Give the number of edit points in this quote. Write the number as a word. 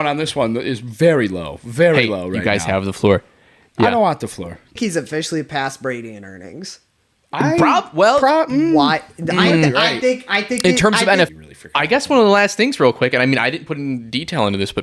two